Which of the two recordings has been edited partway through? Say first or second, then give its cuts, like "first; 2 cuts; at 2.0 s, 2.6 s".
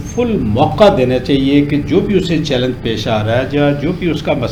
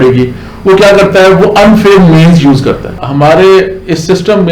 second; 1 cut; at 3.0 s